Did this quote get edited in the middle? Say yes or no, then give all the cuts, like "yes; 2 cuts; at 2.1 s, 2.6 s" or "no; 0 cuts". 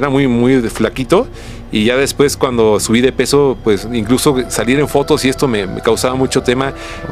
no; 0 cuts